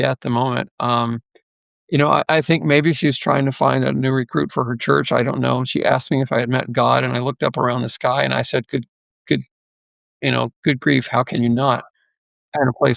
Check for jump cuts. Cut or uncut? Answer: uncut